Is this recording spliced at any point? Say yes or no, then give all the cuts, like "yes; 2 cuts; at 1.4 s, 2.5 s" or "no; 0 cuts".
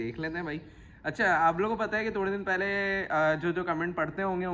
no; 0 cuts